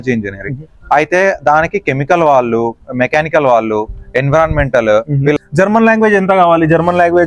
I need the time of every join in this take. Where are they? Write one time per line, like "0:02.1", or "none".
0:05.3